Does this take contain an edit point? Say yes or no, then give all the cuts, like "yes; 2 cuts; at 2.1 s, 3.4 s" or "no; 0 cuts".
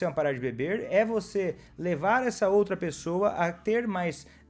no; 0 cuts